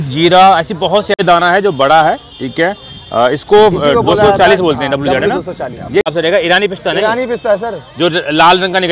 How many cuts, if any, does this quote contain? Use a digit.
2